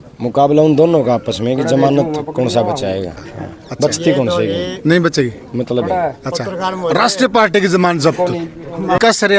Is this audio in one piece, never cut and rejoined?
yes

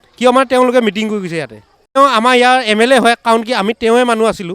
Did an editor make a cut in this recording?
yes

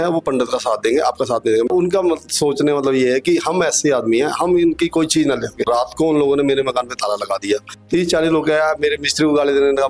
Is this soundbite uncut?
no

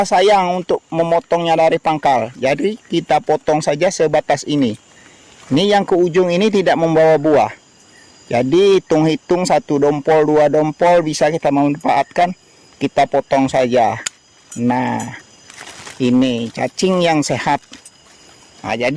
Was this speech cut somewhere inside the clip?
no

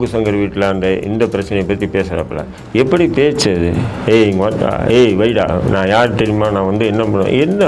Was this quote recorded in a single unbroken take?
yes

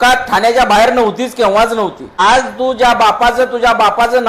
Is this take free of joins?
no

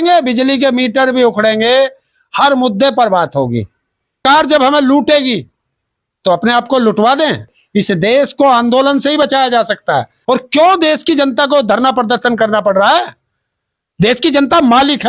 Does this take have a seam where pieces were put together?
yes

